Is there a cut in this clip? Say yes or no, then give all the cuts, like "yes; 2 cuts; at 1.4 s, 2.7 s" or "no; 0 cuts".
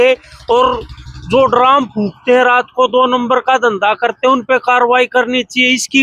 no; 0 cuts